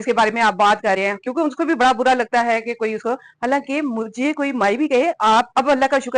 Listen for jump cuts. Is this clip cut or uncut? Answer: uncut